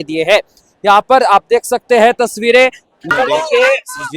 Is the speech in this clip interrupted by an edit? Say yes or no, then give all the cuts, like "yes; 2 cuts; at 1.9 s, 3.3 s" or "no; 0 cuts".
yes; 1 cut; at 3.1 s